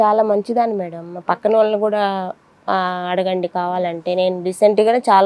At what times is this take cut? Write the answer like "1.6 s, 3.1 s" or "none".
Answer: none